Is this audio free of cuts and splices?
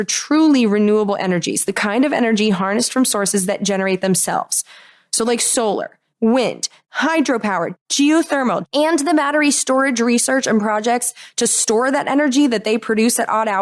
no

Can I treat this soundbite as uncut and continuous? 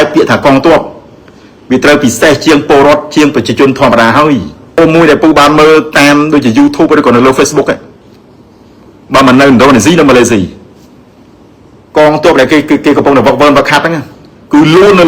no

